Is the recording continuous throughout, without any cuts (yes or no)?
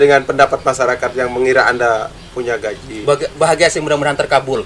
yes